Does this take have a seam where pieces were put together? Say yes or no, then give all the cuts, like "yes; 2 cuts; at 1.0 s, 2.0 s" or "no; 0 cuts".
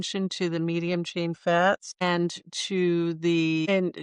no; 0 cuts